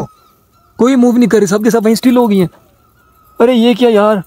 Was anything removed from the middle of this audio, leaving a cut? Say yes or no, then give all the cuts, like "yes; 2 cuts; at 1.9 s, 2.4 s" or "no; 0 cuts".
no; 0 cuts